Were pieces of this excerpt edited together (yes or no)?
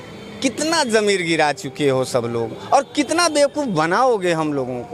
no